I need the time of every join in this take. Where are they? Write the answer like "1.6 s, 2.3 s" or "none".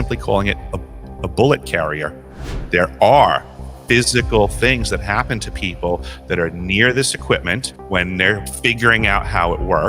2.5 s, 7.7 s, 8.5 s